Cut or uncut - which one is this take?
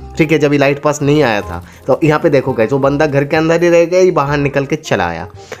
uncut